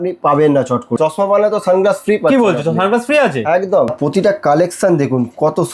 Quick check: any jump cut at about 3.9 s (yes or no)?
yes